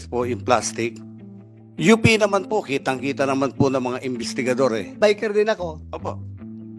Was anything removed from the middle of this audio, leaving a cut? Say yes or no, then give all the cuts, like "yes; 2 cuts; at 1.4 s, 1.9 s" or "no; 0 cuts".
yes; 1 cut; at 4.9 s